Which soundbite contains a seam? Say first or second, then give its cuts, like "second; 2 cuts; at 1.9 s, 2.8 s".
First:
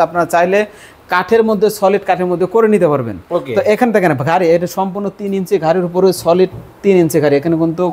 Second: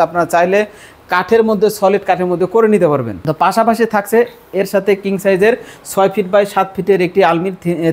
second; 1 cut; at 3.1 s